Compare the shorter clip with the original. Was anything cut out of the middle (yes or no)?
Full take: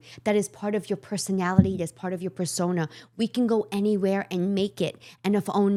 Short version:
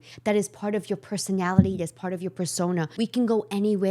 yes